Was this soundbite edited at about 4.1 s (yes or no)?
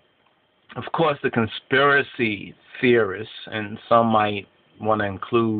no